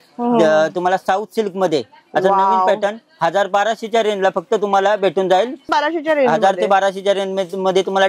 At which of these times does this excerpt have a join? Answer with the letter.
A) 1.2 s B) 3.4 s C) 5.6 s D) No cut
C